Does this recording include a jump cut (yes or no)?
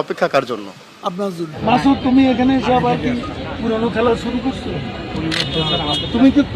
yes